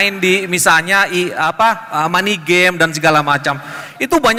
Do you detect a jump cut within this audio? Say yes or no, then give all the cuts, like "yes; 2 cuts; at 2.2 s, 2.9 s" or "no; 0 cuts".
no; 0 cuts